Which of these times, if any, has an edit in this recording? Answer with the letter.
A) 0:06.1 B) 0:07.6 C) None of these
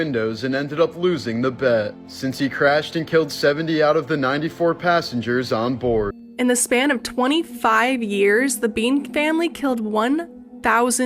A